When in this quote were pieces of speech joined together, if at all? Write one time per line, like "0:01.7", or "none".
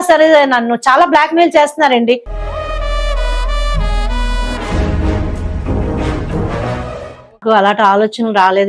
0:07.4